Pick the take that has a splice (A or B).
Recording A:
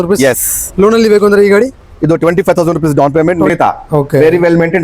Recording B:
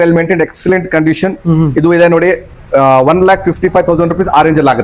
A